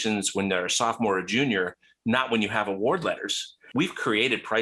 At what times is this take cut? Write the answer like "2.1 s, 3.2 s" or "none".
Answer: 3.7 s